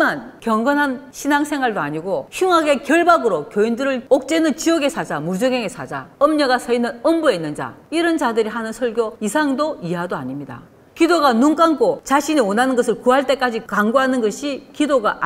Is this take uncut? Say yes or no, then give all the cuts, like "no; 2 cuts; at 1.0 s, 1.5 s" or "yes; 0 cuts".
yes; 0 cuts